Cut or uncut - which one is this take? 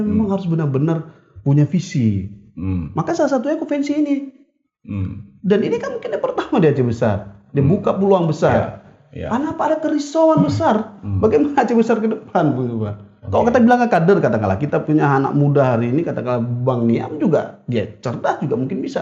uncut